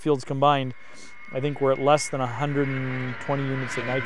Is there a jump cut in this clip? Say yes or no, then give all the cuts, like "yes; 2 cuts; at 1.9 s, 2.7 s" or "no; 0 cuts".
no; 0 cuts